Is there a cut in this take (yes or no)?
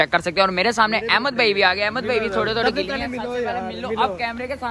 no